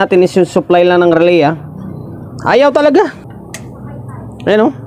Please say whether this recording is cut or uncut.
cut